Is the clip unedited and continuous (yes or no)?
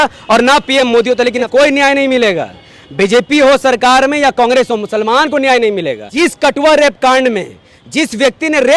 no